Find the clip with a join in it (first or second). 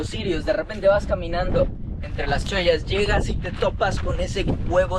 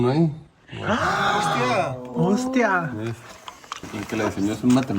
second